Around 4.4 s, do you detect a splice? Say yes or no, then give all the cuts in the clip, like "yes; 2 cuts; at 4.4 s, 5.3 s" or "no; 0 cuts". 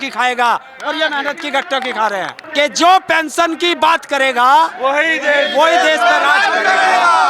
no; 1 cut; at 2.4 s